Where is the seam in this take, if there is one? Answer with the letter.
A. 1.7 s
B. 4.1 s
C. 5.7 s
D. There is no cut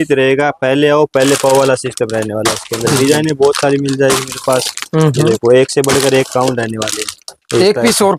D